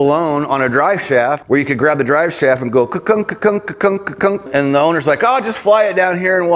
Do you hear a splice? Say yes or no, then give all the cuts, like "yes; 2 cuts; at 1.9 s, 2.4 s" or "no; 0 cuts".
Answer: yes; 2 cuts; at 1.4 s, 4.5 s